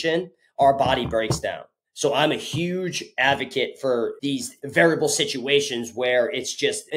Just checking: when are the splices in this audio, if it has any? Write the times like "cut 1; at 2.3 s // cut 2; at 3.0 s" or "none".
cut 1; at 4.2 s